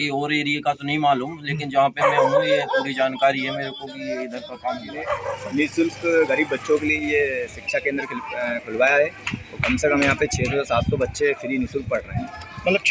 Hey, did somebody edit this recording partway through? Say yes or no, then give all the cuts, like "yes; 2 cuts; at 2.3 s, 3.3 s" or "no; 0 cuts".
yes; 1 cut; at 5.1 s